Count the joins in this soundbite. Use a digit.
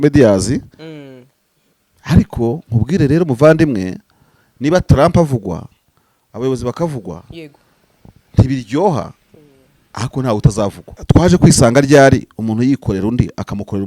1